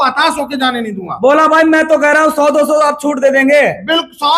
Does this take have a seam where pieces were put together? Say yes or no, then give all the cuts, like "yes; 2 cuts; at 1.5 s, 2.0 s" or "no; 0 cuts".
no; 0 cuts